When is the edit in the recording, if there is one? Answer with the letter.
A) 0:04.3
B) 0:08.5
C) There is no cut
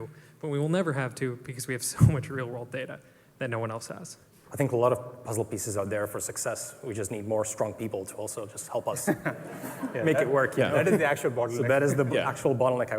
A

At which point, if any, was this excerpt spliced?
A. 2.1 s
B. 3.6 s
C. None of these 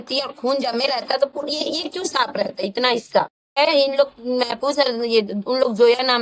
B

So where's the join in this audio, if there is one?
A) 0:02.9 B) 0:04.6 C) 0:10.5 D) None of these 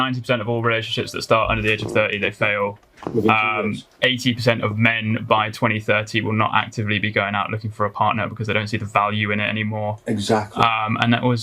D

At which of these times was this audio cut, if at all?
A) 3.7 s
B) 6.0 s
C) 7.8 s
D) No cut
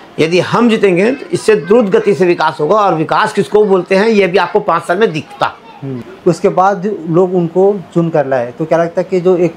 B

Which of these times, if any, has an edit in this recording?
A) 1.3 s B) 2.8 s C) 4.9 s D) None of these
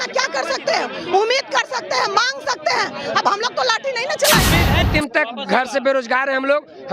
C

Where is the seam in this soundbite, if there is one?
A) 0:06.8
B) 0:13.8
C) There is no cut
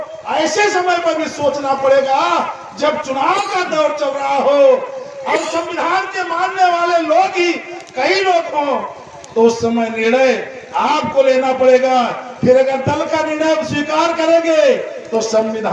C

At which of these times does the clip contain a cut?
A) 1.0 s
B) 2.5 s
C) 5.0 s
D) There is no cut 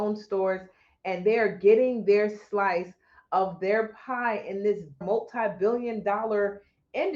C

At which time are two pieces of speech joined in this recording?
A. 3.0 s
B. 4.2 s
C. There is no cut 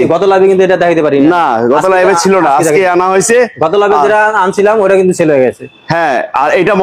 C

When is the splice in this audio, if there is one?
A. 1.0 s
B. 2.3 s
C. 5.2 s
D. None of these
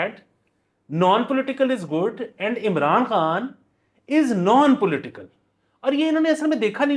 D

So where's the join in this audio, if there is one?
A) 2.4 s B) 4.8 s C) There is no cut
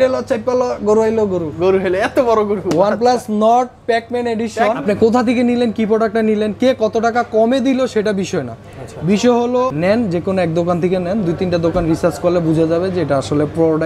B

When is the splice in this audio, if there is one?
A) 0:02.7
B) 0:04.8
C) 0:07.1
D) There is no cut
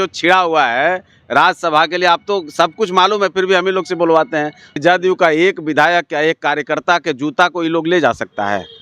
B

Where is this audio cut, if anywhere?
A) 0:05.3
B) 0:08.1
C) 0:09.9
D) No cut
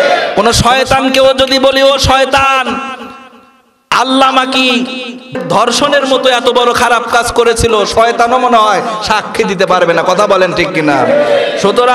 A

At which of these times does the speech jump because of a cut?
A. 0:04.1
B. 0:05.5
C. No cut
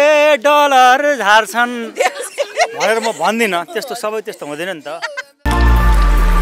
B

